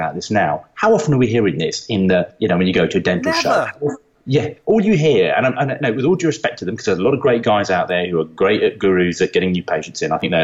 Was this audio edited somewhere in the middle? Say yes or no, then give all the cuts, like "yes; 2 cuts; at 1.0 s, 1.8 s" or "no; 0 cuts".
no; 0 cuts